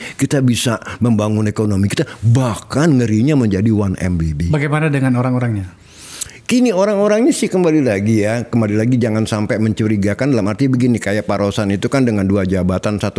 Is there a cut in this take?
no; 0 cuts

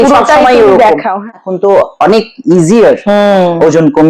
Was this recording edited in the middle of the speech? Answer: yes; 1 cut; at 1.2 s

